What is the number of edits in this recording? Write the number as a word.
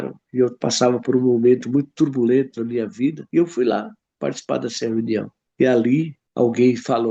three